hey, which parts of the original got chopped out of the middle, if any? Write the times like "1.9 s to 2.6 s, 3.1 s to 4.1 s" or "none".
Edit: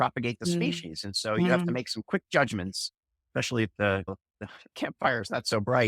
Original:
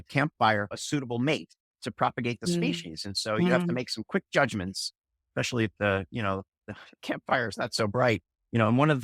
6.1 s to 6.4 s